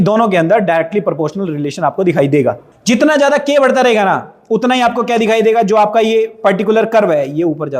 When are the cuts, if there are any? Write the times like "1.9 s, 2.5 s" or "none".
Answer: 2.6 s